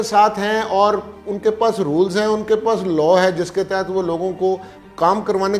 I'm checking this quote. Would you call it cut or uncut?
uncut